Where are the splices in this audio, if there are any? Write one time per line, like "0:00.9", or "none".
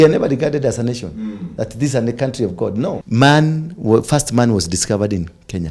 0:03.0